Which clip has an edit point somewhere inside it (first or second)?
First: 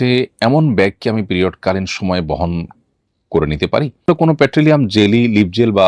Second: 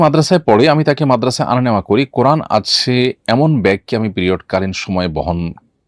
first